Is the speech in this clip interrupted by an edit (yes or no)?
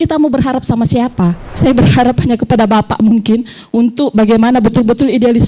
yes